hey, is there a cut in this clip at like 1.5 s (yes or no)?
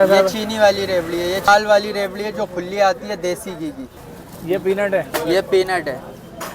yes